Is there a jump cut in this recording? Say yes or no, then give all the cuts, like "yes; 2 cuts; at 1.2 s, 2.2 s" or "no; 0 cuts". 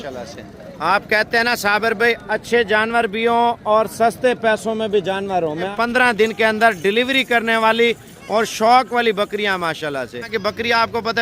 yes; 2 cuts; at 5.7 s, 10.3 s